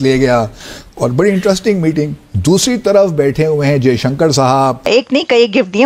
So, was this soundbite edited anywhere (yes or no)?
yes